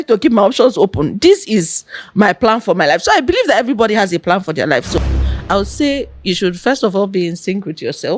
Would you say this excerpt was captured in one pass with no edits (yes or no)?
no